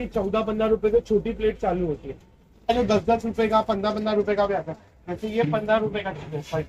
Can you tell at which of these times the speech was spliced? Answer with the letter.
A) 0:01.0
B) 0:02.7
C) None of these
B